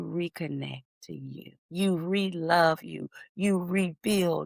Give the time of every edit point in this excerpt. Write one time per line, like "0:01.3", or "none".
0:01.5